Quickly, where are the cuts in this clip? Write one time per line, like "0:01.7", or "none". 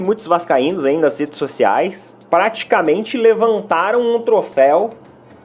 0:02.1